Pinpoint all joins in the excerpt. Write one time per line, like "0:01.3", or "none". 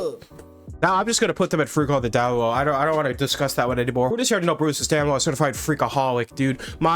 0:04.1